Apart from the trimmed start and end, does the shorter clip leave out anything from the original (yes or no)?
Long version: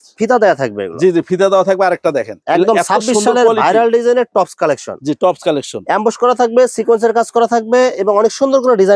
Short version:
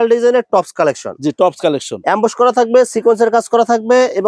no